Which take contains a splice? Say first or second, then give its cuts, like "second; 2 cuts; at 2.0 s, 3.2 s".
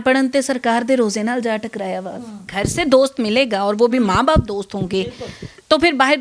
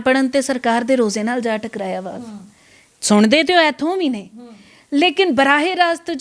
first; 1 cut; at 2.4 s